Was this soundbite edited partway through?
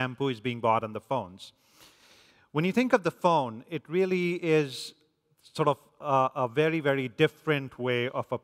no; 0 cuts

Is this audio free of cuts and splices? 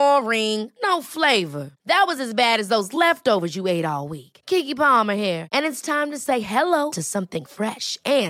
yes; 0 cuts

